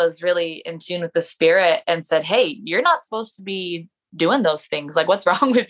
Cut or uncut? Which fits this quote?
uncut